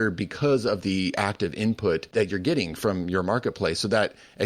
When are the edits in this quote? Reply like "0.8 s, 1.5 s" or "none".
2.1 s

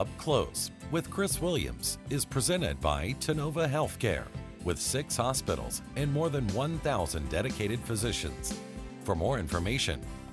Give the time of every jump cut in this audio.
none

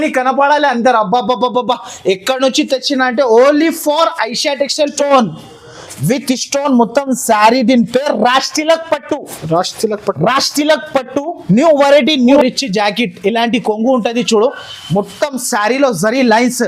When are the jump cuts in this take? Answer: 4.9 s, 12.4 s

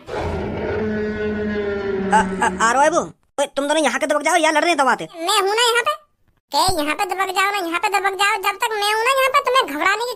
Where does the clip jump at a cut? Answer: 5.2 s

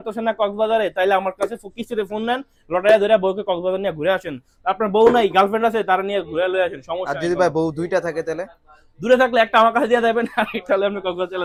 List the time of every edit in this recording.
none

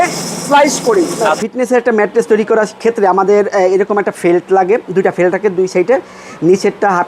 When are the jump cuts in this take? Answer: 1.2 s

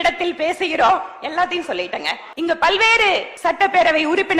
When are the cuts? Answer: 2.2 s, 3.3 s

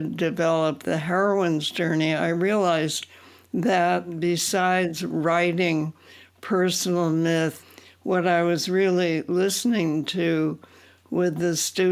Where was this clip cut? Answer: 4.1 s, 7.6 s

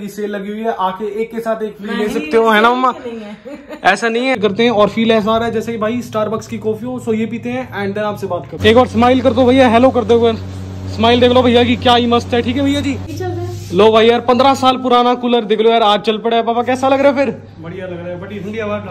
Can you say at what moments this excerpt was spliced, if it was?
4.4 s, 8.5 s, 13.1 s

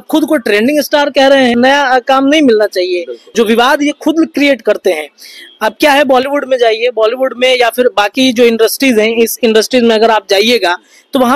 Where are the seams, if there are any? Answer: 1.5 s, 3.2 s

